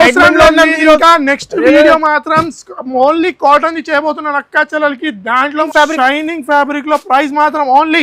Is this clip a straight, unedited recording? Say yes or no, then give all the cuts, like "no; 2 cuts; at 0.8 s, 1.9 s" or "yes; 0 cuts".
no; 1 cut; at 5.7 s